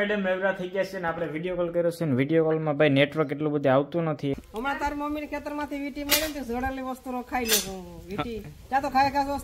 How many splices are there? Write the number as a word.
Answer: one